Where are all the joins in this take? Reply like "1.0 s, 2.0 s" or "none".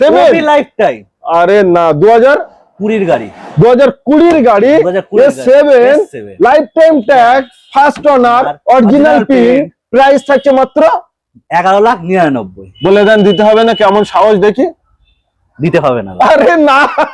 none